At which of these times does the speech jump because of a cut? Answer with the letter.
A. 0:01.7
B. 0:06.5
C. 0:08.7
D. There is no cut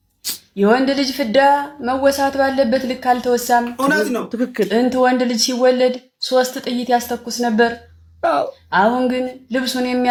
D